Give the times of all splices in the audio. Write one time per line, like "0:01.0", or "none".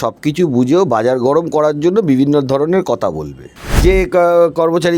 0:03.8